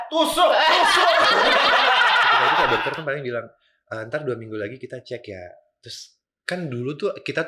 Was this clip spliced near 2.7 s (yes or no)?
yes